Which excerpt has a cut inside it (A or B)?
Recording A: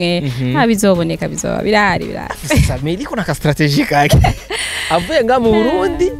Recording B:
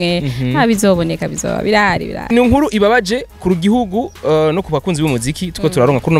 B